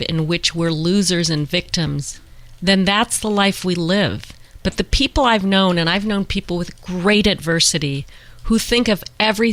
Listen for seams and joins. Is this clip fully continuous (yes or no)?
yes